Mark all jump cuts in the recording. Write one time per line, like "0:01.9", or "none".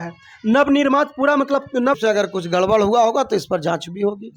0:02.0